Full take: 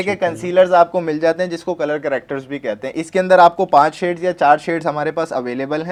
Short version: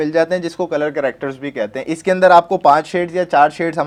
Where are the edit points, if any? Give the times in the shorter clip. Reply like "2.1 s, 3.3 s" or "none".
none